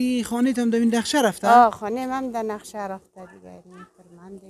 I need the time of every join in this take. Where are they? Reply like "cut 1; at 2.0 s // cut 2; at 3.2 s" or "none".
none